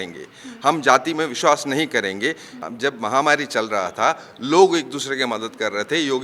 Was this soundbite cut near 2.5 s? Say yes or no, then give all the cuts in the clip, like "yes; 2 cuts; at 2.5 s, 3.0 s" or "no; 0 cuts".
yes; 1 cut; at 2.5 s